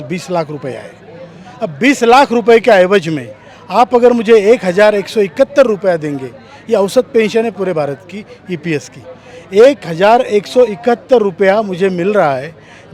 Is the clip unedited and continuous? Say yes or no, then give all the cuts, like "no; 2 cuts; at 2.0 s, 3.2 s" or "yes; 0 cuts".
yes; 0 cuts